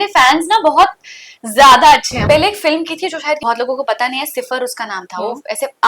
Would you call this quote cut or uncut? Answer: cut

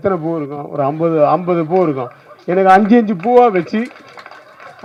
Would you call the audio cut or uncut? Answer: uncut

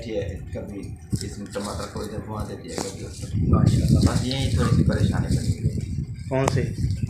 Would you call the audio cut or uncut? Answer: cut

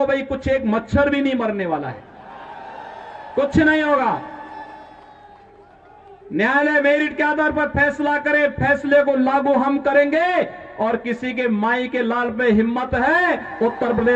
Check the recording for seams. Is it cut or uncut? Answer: uncut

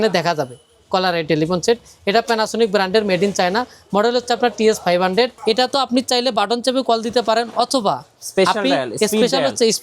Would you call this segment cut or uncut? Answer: cut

